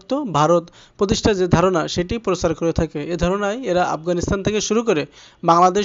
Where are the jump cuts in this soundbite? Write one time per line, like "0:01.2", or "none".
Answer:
none